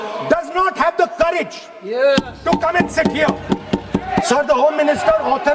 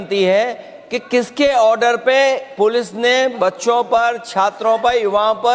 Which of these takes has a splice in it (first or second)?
first